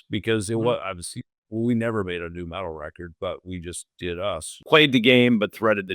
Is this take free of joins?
no; 1 cut; at 4.6 s

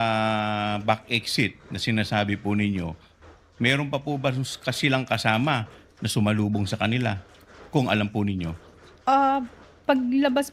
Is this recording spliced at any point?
no; 0 cuts

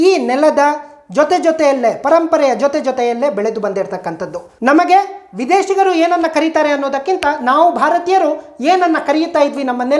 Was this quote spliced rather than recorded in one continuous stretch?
yes; 1 cut; at 4.4 s

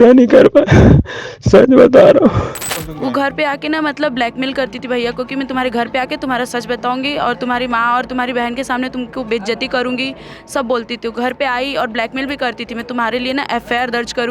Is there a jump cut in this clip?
yes; 1 cut; at 2.8 s

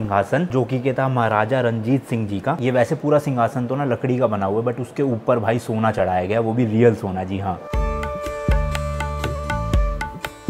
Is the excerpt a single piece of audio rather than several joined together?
yes; 0 cuts

